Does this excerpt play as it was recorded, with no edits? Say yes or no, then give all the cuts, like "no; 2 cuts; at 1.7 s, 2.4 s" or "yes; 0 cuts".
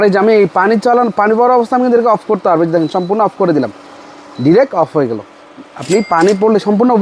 yes; 0 cuts